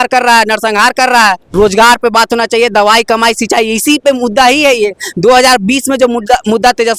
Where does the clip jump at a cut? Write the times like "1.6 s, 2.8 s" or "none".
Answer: 1.5 s